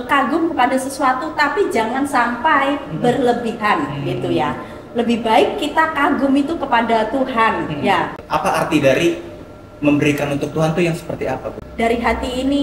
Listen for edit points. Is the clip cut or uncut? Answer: cut